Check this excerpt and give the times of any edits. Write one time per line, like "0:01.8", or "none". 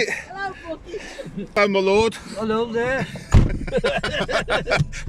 0:01.6